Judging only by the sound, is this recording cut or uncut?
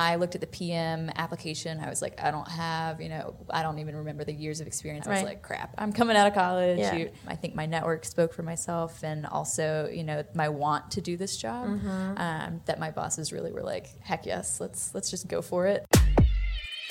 cut